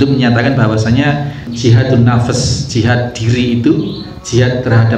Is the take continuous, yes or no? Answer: no